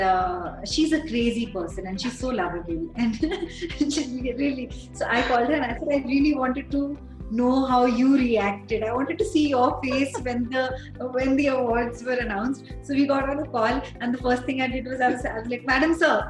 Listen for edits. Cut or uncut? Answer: uncut